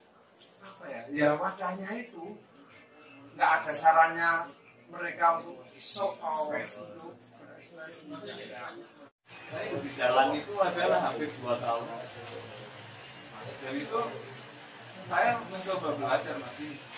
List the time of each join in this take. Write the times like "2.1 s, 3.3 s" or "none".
9.1 s